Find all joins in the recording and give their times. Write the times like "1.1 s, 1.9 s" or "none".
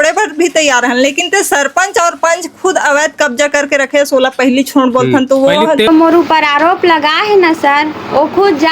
5.9 s